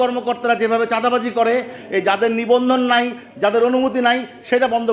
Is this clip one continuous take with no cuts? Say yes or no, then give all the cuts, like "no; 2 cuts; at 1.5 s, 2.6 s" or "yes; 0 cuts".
yes; 0 cuts